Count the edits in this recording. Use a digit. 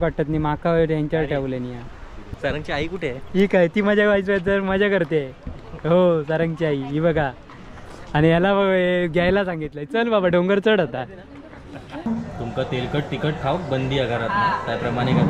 2